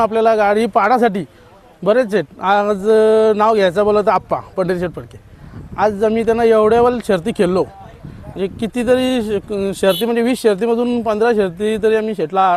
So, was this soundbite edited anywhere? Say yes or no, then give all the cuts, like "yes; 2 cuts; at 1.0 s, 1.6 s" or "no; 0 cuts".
no; 0 cuts